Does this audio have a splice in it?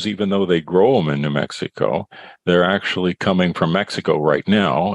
no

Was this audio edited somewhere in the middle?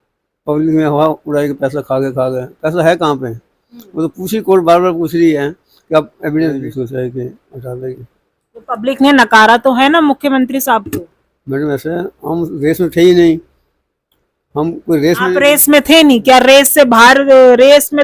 yes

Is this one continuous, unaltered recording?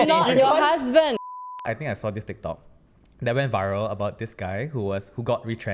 no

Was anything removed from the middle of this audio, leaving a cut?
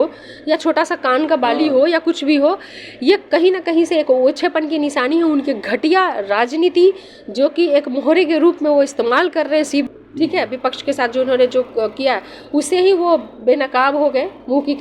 yes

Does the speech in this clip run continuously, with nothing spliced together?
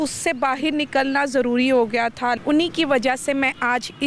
no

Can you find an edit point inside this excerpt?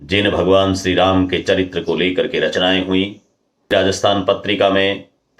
yes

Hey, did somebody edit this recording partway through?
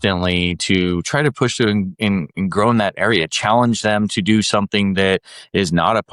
no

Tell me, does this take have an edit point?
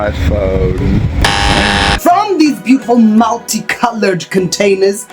yes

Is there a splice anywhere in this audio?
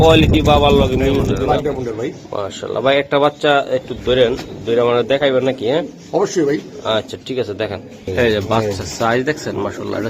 yes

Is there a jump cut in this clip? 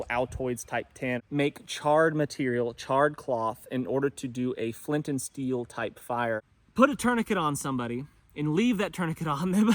yes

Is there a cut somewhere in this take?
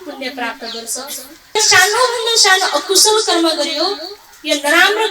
yes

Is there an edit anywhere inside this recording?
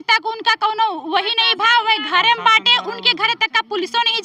no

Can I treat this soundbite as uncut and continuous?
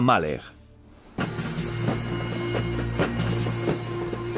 no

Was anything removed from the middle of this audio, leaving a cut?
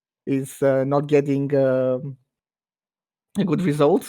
no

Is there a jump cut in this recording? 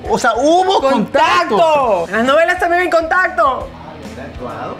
yes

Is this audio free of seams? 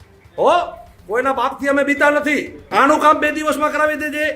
no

